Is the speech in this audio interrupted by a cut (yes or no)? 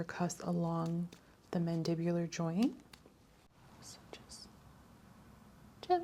yes